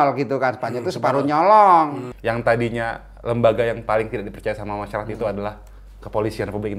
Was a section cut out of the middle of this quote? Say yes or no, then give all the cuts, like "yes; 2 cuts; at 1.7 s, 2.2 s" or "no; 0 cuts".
yes; 1 cut; at 2.1 s